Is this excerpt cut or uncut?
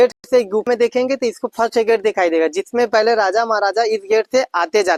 uncut